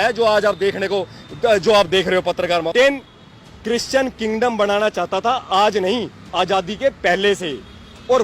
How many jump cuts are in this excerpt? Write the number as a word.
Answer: one